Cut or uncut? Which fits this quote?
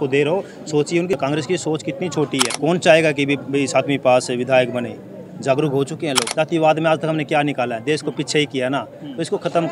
cut